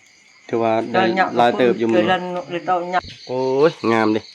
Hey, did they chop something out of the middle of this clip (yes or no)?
yes